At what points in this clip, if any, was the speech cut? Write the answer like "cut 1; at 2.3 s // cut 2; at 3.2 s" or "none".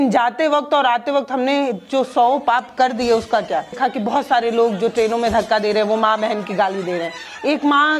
cut 1; at 3.8 s